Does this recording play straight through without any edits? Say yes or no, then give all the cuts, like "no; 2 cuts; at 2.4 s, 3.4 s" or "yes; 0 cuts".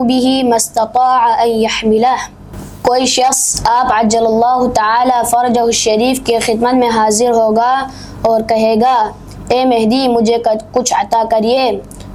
yes; 0 cuts